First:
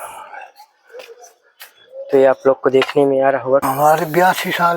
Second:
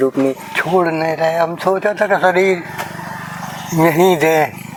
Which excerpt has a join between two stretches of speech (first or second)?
first